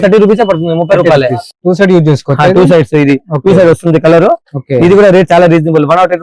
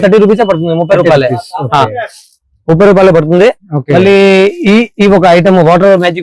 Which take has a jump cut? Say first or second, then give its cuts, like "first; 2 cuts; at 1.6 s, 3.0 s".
first; 1 cut; at 1.5 s